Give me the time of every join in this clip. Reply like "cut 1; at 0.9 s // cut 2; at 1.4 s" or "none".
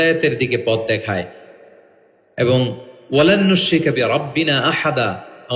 none